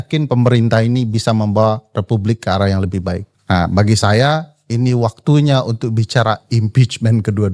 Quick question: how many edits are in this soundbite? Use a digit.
1